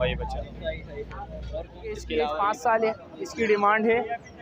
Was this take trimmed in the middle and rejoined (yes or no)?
yes